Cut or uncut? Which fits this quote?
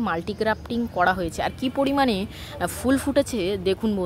uncut